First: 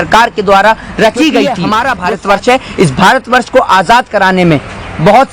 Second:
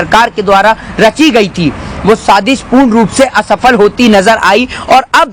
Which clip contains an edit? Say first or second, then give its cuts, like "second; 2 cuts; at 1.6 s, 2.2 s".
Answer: first; 1 cut; at 1.6 s